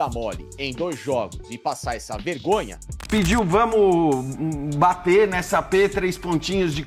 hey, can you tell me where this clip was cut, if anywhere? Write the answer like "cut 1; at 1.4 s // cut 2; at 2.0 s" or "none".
cut 1; at 2.9 s